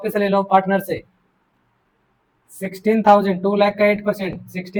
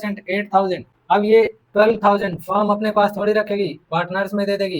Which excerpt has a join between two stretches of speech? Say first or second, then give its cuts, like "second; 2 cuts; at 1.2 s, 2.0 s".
second; 1 cut; at 0.9 s